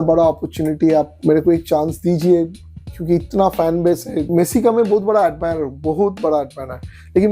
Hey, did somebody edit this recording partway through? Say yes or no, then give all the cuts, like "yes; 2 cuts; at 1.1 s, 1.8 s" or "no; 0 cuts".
yes; 2 cuts; at 1.2 s, 4.2 s